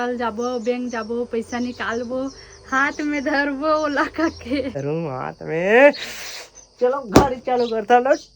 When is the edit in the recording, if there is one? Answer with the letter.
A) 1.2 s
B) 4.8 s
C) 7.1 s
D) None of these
B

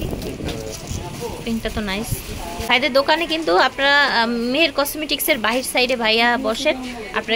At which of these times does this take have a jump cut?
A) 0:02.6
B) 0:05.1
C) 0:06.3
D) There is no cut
A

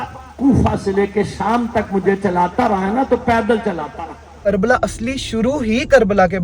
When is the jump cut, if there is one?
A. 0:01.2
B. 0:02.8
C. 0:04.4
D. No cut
C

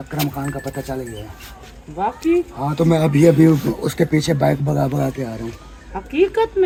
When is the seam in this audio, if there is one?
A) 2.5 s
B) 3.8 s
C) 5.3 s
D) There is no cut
D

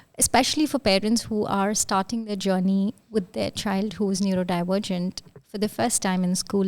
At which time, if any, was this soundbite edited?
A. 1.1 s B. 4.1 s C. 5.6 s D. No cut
D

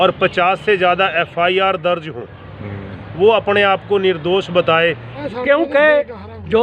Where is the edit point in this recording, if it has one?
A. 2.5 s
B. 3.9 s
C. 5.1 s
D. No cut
C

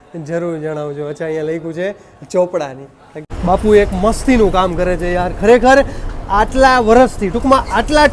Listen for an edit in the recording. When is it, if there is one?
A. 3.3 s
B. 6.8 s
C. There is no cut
A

